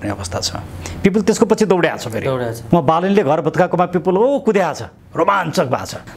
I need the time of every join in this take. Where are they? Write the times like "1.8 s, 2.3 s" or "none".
none